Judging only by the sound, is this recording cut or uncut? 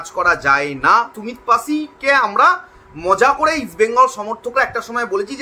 cut